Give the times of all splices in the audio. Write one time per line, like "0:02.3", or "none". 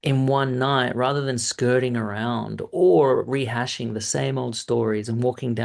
none